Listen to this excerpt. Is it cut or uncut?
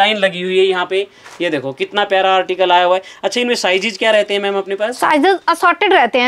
uncut